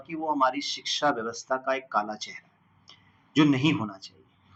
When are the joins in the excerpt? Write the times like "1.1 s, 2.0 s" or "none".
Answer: none